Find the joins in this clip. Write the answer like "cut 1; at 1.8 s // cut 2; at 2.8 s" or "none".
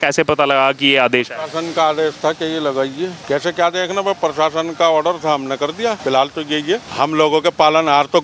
cut 1; at 3.2 s // cut 2; at 6.0 s // cut 3; at 6.9 s